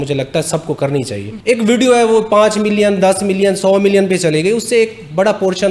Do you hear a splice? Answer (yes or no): yes